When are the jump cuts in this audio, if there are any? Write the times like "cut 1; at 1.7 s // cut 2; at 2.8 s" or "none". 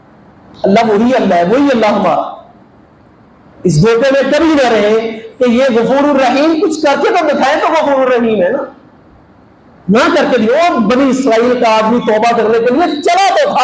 none